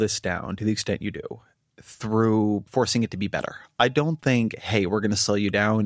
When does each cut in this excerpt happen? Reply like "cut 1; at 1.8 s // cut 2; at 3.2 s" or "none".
cut 1; at 2.7 s